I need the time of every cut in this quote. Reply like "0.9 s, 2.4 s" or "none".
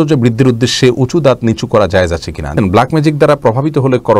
2.5 s